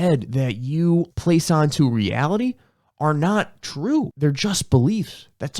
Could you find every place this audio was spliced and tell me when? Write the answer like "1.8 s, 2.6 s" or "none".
1.1 s, 4.1 s